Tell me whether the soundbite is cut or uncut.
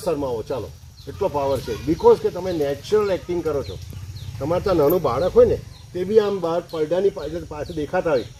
uncut